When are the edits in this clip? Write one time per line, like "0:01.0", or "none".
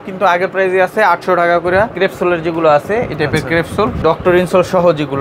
0:01.9
0:04.0